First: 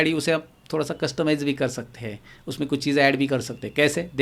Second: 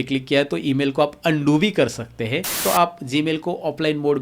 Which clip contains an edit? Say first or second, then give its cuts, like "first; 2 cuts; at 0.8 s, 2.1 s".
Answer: second; 1 cut; at 2.6 s